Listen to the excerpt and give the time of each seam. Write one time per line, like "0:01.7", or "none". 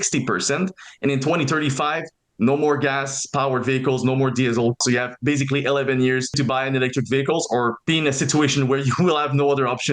0:04.8
0:06.3
0:07.8